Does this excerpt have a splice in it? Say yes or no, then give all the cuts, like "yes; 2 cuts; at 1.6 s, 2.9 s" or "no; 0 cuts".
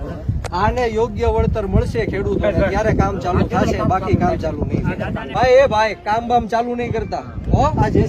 yes; 1 cut; at 5.4 s